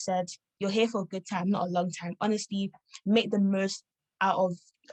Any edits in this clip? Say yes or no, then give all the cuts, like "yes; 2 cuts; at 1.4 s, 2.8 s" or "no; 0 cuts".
no; 0 cuts